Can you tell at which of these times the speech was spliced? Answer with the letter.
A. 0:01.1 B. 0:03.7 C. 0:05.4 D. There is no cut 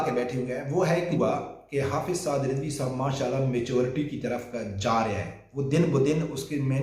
A